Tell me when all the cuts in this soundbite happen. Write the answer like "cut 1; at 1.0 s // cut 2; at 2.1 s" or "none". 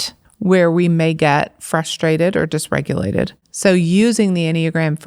cut 1; at 3.4 s